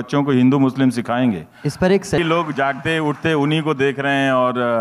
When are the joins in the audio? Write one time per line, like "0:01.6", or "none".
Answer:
0:02.2